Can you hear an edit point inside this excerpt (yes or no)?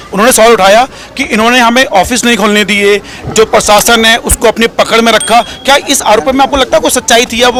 no